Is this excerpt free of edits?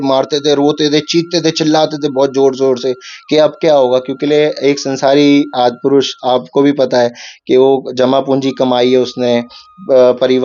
yes; 0 cuts

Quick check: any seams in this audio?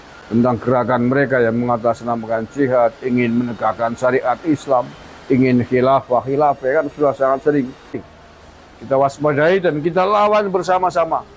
yes; 1 cut; at 8.0 s

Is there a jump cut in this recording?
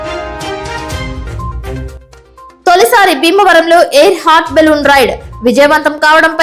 no; 0 cuts

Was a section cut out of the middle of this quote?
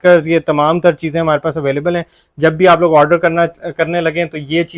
no; 0 cuts

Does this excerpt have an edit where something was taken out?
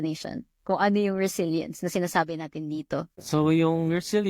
yes; 1 cut; at 3.2 s

